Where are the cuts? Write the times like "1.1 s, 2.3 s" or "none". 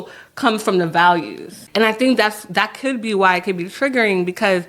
1.5 s